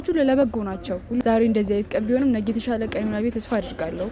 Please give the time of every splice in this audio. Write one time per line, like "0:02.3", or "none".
0:01.2